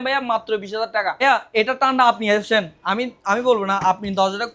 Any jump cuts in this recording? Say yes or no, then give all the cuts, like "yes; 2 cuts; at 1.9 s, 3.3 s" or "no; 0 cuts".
yes; 1 cut; at 1.2 s